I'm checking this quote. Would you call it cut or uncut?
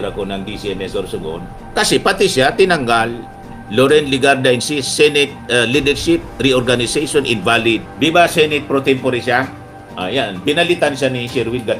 cut